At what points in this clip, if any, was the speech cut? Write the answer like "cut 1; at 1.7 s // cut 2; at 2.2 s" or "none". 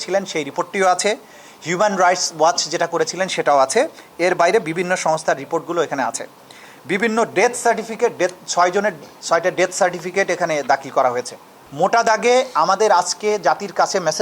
cut 1; at 11.6 s